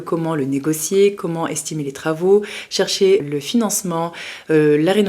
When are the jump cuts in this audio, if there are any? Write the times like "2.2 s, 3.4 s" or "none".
3.2 s